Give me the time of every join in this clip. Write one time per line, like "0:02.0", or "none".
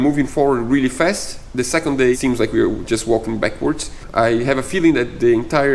0:02.2
0:04.0